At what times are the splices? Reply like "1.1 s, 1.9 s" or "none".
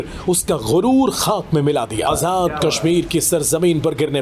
2.0 s